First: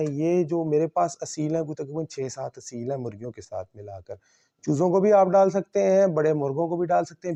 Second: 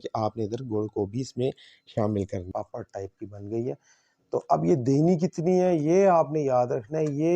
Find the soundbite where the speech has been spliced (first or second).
second